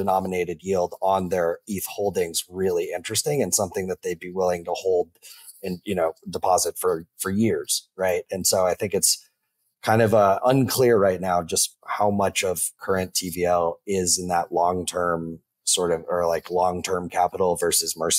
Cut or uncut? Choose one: cut